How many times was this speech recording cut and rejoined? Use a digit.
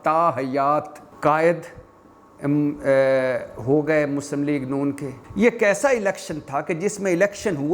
2